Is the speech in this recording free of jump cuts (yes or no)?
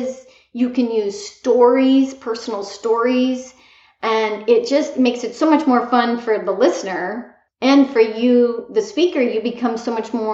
yes